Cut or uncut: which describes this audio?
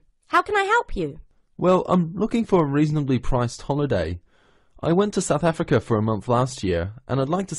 uncut